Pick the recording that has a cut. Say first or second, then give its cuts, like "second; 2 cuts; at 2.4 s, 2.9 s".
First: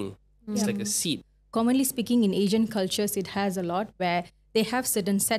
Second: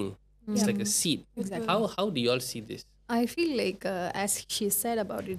first; 1 cut; at 1.3 s